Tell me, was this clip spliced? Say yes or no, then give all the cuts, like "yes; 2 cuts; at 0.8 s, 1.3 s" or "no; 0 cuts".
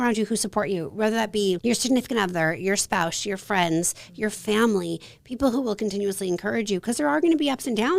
yes; 1 cut; at 1.6 s